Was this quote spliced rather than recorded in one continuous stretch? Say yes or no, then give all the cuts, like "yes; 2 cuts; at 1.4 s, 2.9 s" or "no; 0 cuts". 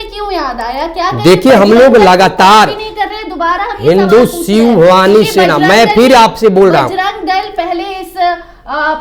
no; 0 cuts